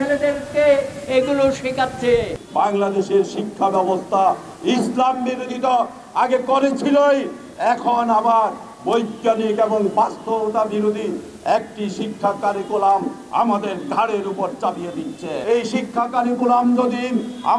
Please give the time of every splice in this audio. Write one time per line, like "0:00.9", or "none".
0:02.4
0:15.3